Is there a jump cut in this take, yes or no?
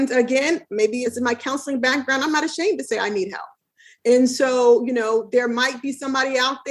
yes